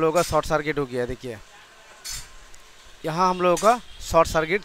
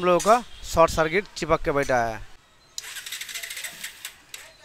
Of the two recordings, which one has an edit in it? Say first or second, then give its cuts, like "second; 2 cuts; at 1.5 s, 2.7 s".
second; 1 cut; at 2.3 s